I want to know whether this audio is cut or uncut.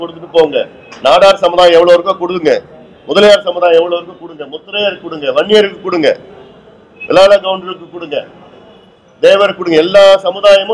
uncut